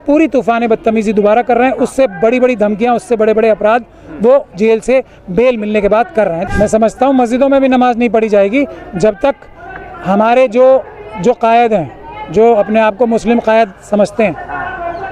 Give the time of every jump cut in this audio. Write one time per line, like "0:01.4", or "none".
0:06.4